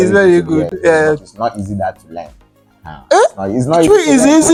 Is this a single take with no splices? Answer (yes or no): yes